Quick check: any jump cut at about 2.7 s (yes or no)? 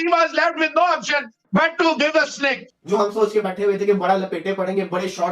yes